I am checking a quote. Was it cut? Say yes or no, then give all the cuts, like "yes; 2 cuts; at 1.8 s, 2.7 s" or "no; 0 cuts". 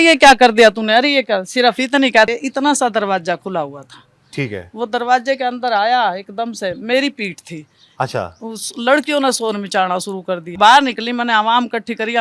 yes; 2 cuts; at 2.3 s, 10.5 s